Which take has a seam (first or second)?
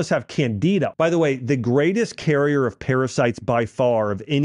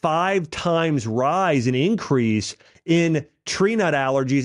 first